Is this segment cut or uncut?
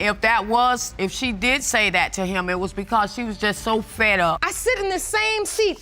cut